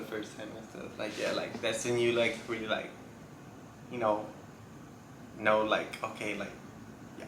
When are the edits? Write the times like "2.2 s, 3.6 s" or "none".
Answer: none

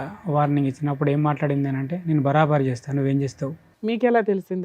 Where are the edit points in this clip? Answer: 3.6 s

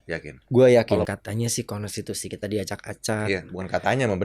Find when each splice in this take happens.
1.1 s

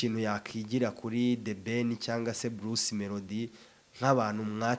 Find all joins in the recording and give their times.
none

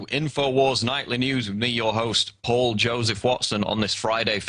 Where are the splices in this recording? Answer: 1.6 s

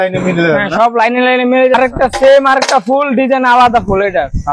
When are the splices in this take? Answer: 1.8 s

